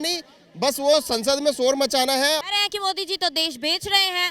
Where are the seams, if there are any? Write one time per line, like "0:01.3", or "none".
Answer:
0:02.4